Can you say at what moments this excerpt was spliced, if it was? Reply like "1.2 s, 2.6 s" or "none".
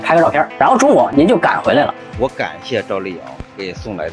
1.1 s, 2.0 s

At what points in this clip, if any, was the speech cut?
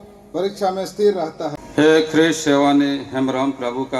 1.6 s

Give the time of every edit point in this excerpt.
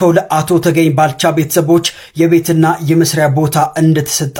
none

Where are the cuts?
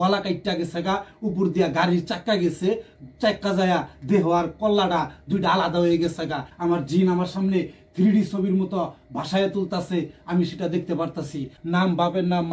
6.5 s, 11.5 s

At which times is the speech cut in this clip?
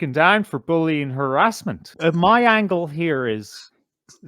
1.8 s

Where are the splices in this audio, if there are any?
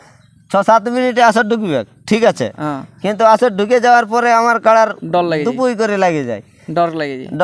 none

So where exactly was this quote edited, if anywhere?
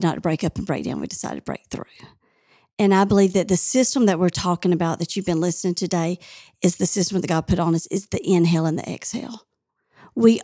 none

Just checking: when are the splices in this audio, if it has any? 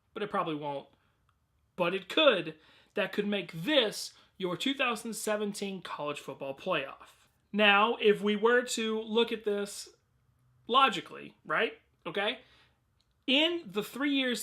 3.5 s

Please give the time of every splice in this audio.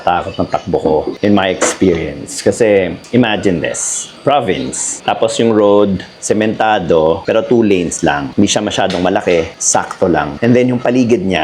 3.0 s

